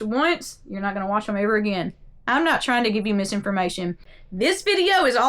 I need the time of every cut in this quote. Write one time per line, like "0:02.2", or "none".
0:04.2